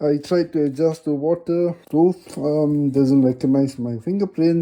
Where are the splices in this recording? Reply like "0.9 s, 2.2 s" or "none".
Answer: 1.8 s